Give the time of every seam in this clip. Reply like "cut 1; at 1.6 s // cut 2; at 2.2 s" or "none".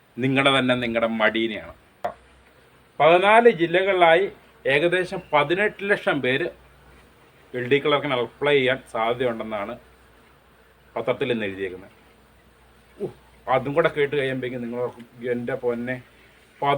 cut 1; at 2.0 s